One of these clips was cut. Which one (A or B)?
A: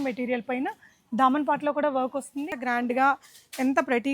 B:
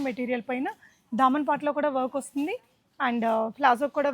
A